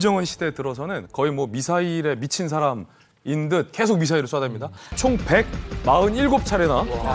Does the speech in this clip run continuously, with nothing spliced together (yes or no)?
no